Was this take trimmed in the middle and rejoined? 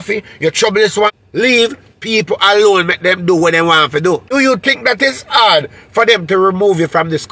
yes; 2 cuts; at 1.2 s, 4.3 s

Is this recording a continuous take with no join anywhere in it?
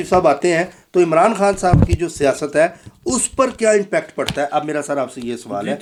yes; 0 cuts

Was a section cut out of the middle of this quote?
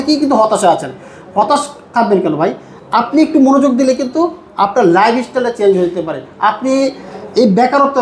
no; 0 cuts

